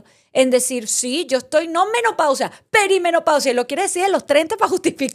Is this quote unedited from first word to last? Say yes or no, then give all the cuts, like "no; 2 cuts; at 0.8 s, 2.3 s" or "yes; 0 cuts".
yes; 0 cuts